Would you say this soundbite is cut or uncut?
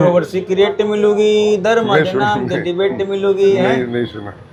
uncut